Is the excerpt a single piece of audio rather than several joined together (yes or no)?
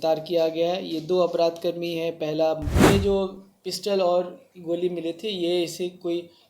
no